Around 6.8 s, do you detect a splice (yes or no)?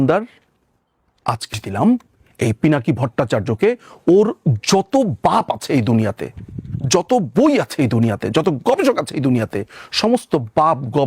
no